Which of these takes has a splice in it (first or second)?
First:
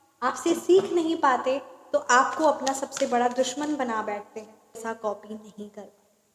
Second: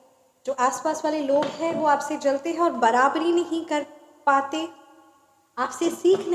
first